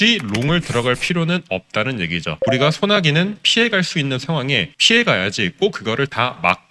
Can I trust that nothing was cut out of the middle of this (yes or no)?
yes